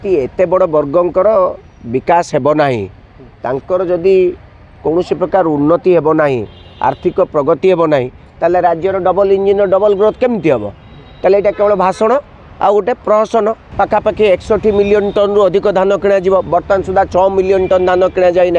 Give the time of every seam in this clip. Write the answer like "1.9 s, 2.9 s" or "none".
13.6 s